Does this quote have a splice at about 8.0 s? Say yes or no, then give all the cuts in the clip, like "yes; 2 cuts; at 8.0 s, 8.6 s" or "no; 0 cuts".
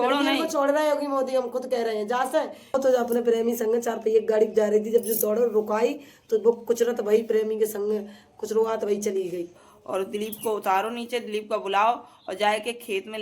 no; 2 cuts; at 2.7 s, 9.6 s